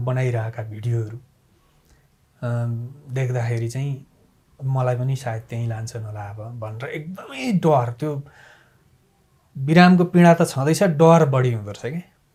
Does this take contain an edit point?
no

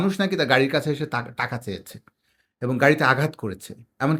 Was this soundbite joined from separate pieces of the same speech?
no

